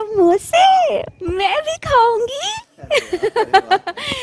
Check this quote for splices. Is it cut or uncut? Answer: uncut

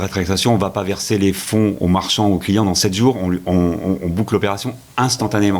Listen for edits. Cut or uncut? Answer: uncut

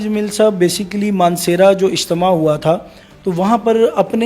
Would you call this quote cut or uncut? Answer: uncut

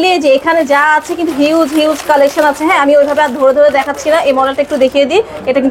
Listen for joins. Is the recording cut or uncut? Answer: uncut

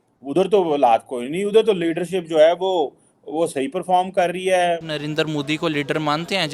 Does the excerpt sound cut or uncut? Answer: cut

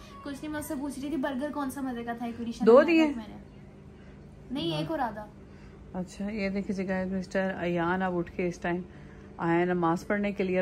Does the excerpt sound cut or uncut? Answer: uncut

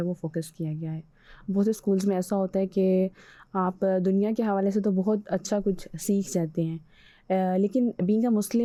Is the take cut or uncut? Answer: uncut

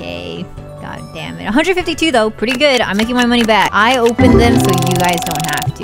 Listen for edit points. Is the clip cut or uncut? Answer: cut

